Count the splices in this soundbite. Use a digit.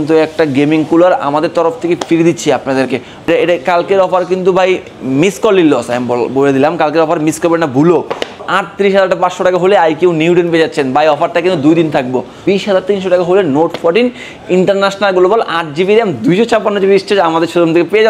3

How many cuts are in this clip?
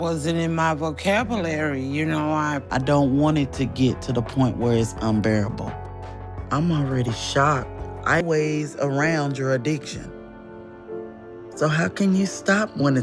0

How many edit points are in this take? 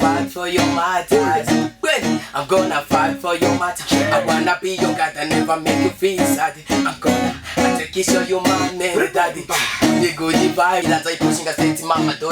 1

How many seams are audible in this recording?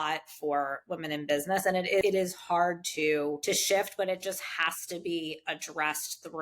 2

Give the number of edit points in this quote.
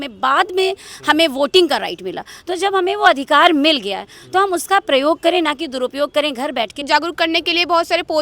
1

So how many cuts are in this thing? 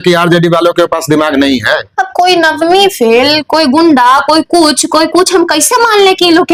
0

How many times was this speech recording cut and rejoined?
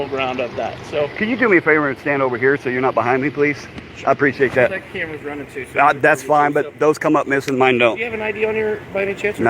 1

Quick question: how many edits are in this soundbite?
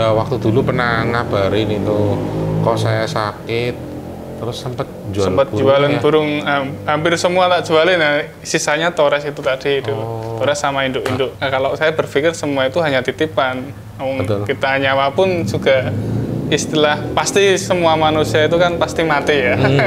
1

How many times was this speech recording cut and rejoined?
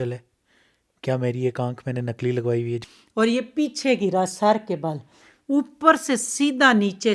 1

